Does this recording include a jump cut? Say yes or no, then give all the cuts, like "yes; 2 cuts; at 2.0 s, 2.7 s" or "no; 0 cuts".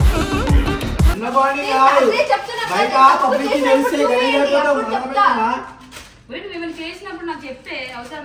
no; 0 cuts